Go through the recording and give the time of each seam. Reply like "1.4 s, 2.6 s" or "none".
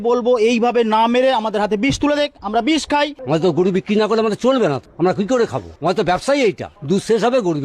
3.2 s, 4.9 s, 5.7 s, 6.7 s